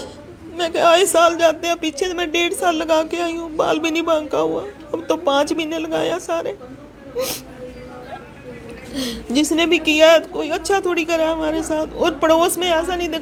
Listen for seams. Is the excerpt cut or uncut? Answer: uncut